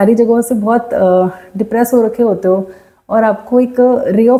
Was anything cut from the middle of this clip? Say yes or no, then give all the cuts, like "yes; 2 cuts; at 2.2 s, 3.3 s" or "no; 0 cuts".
no; 0 cuts